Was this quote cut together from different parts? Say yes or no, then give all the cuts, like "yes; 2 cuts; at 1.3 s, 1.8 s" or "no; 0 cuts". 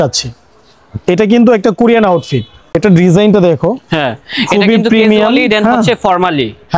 no; 0 cuts